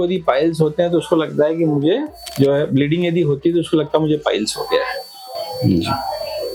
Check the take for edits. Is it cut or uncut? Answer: uncut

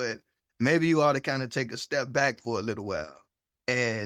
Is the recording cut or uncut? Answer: uncut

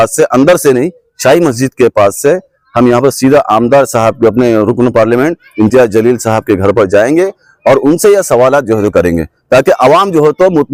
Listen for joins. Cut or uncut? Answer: uncut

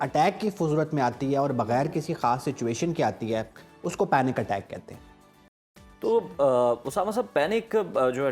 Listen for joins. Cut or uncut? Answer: uncut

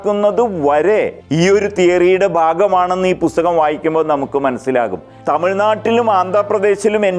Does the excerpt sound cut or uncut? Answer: cut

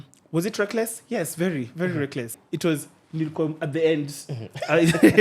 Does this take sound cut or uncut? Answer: cut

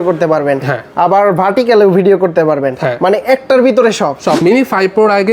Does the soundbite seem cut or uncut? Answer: cut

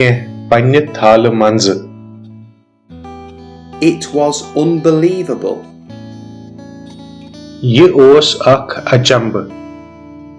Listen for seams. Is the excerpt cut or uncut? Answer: cut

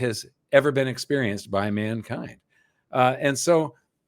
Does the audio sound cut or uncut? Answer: uncut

